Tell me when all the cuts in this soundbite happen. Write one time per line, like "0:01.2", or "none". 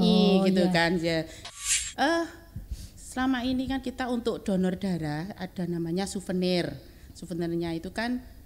0:01.5